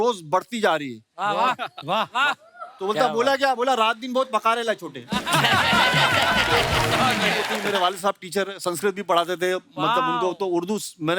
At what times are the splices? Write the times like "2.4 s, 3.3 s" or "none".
7.6 s